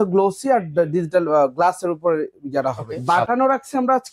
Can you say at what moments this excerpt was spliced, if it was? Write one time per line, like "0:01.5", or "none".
0:02.9